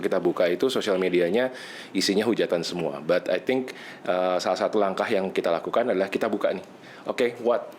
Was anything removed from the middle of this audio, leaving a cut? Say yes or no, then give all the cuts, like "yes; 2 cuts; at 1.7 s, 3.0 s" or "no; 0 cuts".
no; 0 cuts